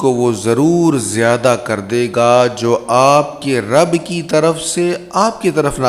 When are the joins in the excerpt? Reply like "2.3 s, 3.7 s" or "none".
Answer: none